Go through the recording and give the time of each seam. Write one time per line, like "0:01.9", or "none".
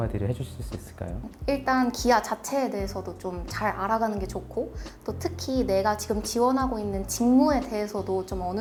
none